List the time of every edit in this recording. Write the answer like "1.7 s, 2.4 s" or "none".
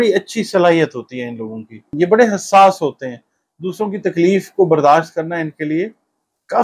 1.8 s